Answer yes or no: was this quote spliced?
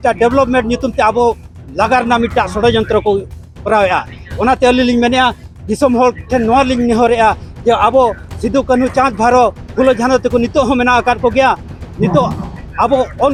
no